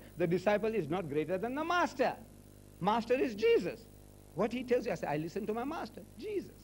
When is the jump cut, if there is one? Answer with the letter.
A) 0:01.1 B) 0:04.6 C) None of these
A